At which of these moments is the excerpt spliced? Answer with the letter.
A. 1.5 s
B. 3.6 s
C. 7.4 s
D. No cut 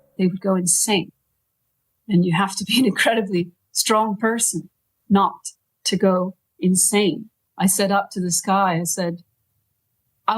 C